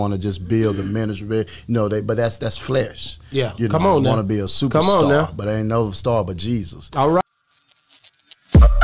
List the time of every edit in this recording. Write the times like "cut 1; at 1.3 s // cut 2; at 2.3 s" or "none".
cut 1; at 7.2 s